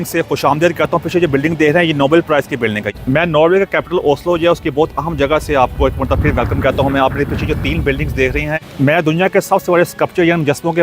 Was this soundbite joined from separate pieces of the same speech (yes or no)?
yes